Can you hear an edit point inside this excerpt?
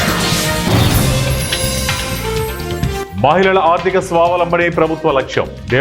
yes; 1 cut; at 3.0 s

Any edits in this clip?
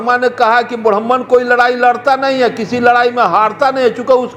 no; 0 cuts

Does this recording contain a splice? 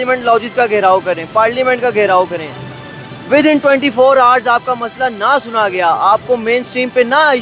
no; 0 cuts

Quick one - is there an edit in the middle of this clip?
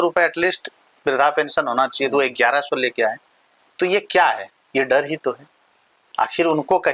no; 0 cuts

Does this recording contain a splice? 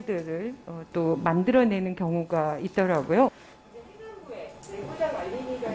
yes; 1 cut; at 3.4 s

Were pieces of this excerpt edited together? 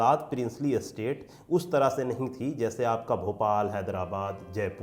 no; 0 cuts

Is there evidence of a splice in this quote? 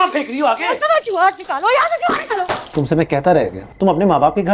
yes; 2 cuts; at 2.6 s, 3.7 s

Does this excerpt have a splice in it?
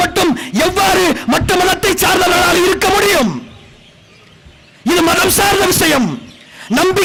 no; 0 cuts

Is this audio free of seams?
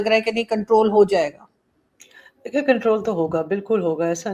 yes; 0 cuts

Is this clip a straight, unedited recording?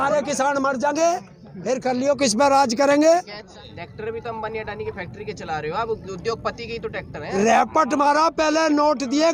no; 1 cut; at 3.5 s

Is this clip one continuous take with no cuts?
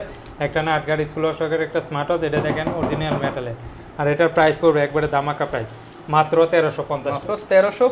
yes; 0 cuts

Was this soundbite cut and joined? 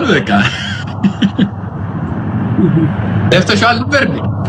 no; 0 cuts

